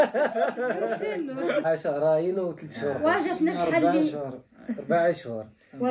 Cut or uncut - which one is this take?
cut